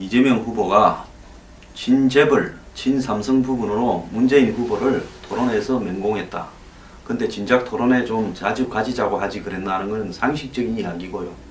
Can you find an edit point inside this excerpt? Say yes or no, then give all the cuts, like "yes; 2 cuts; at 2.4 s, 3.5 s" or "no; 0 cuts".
no; 0 cuts